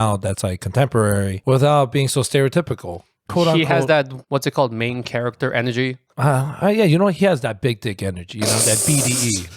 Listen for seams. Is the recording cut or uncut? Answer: cut